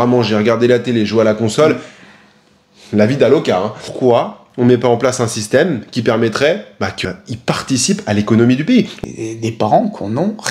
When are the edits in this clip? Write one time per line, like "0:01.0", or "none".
0:03.8
0:07.0
0:08.9